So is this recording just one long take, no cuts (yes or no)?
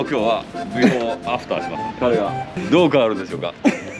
no